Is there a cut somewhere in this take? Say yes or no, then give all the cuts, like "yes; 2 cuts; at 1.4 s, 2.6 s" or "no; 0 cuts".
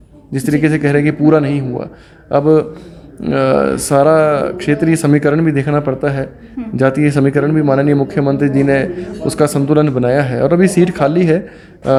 no; 0 cuts